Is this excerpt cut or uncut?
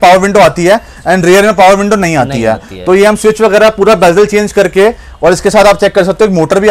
uncut